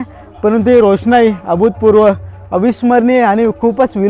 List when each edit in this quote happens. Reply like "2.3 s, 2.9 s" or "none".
none